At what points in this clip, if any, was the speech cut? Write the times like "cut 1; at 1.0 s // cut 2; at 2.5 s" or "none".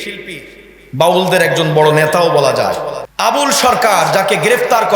cut 1; at 3.0 s

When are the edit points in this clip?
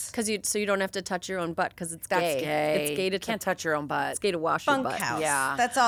none

